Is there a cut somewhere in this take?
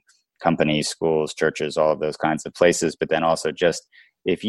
no; 0 cuts

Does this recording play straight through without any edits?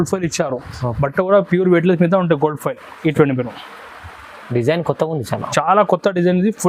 yes; 0 cuts

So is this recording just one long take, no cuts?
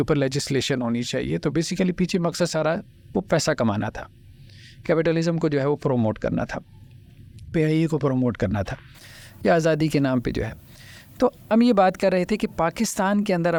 yes; 0 cuts

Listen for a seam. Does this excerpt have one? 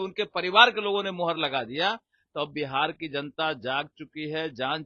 no; 0 cuts

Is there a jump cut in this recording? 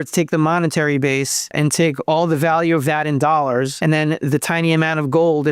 yes; 2 cuts; at 1.5 s, 3.7 s

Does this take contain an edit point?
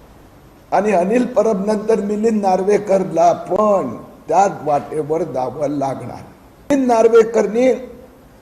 yes; 1 cut; at 6.7 s

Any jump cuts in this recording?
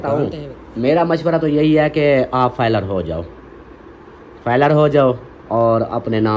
no; 0 cuts

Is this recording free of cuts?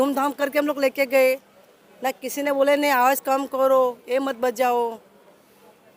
yes; 0 cuts

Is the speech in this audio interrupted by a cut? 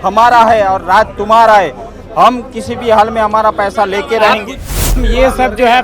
yes; 1 cut; at 4.6 s

